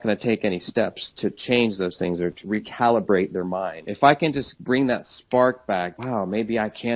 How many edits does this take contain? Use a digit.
4